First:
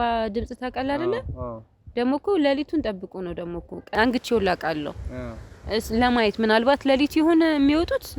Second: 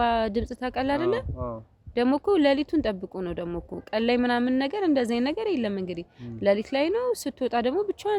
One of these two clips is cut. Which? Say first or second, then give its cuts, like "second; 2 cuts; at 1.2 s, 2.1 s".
first; 1 cut; at 3.9 s